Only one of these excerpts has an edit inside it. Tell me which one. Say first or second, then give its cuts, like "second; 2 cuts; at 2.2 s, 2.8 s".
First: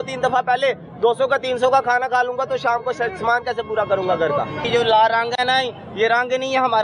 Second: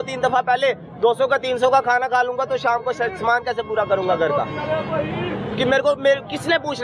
first; 1 cut; at 4.6 s